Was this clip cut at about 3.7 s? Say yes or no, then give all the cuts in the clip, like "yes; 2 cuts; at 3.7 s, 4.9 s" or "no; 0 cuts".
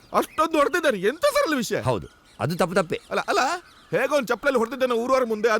yes; 1 cut; at 3.7 s